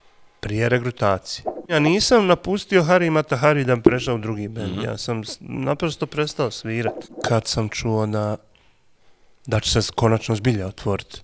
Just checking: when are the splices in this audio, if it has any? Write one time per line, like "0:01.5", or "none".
0:01.7
0:07.1